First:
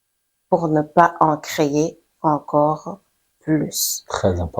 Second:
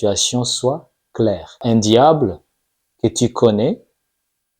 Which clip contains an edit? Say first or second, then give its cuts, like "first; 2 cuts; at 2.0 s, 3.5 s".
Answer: second; 1 cut; at 1.6 s